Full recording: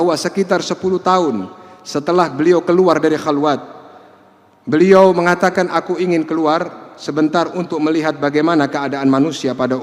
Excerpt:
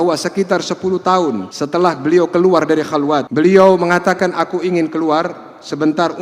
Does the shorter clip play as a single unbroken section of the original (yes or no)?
no